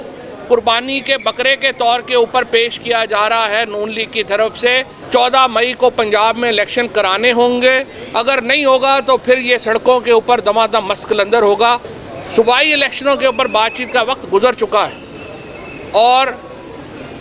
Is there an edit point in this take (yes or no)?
yes